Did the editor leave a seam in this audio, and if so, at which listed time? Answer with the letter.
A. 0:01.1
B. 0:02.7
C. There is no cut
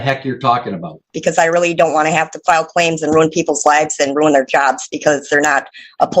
A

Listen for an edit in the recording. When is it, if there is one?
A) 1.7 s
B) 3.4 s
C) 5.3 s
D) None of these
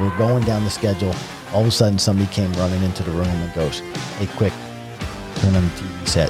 D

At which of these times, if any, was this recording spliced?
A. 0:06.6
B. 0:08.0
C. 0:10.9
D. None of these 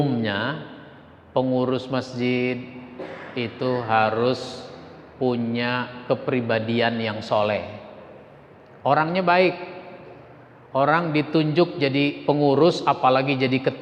D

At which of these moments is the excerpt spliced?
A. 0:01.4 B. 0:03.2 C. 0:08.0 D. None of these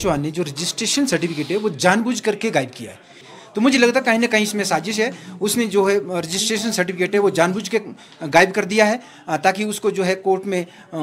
B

